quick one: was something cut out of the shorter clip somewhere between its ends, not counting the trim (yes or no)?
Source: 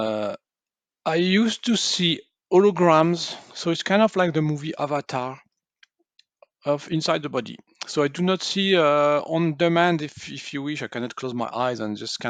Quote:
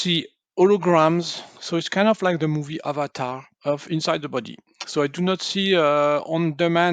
yes